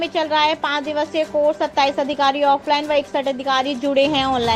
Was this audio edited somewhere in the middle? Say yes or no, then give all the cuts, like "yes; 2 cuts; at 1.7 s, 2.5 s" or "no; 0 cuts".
no; 0 cuts